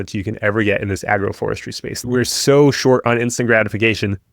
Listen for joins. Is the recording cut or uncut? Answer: cut